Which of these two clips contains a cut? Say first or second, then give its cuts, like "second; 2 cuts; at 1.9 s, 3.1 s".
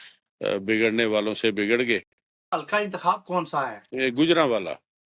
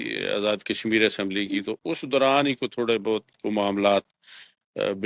first; 1 cut; at 2.5 s